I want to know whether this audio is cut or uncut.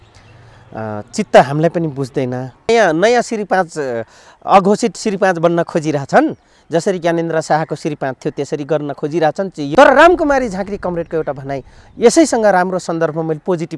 cut